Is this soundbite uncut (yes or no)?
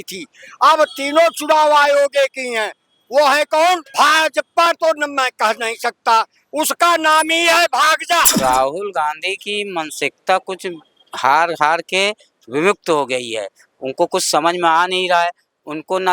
no